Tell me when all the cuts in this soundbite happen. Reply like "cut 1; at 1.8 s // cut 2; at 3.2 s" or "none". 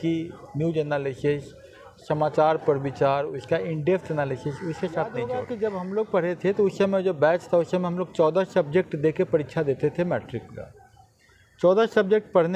cut 1; at 5.3 s